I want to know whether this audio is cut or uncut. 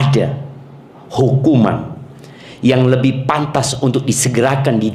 uncut